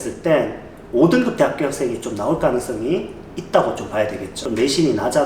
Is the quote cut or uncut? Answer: cut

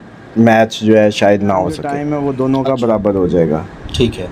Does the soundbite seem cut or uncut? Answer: cut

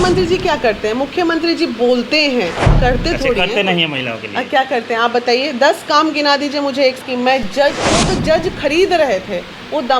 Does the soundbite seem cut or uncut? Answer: cut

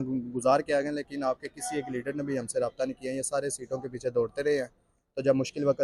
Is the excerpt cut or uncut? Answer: uncut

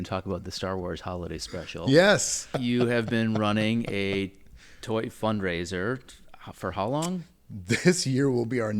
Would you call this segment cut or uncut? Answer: cut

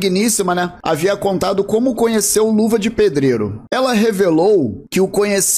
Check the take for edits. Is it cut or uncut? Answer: cut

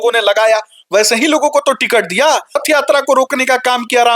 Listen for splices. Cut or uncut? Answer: cut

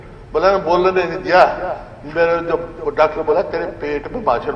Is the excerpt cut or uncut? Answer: uncut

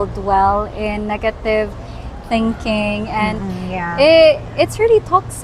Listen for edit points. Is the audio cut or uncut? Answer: uncut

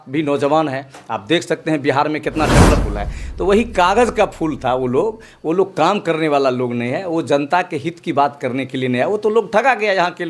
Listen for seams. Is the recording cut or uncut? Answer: cut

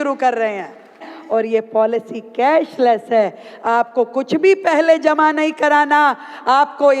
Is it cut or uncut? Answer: cut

